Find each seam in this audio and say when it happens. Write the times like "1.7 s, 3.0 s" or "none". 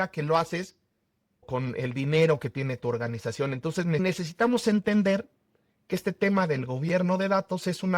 1.5 s, 4.0 s